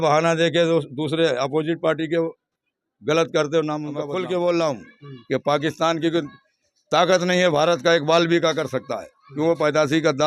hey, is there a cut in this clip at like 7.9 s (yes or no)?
no